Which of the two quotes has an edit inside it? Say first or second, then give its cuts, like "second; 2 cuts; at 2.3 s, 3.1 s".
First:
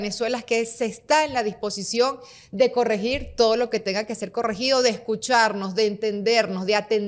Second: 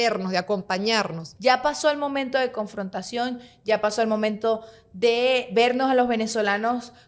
second; 1 cut; at 1.2 s